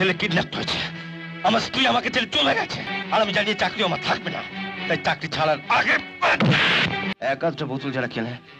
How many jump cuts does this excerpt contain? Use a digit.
1